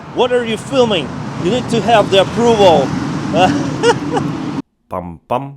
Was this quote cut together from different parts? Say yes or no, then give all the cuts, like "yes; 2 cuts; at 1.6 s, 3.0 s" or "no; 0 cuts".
yes; 1 cut; at 4.7 s